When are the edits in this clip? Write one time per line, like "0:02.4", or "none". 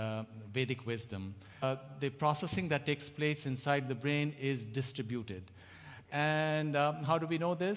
none